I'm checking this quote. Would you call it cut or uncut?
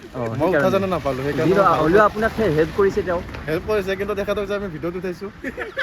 uncut